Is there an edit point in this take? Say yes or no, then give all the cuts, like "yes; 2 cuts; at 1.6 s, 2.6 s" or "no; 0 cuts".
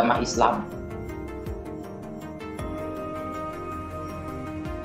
no; 0 cuts